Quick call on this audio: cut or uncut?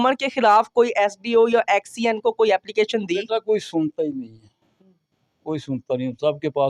uncut